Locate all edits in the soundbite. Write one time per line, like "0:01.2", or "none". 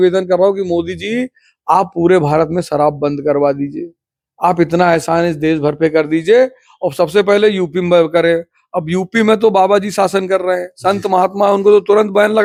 none